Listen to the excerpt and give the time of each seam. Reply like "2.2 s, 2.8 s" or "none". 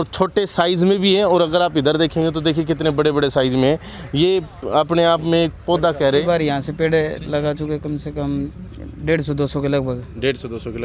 6.1 s